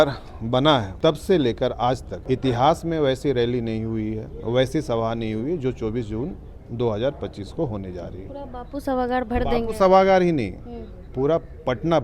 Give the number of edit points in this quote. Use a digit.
2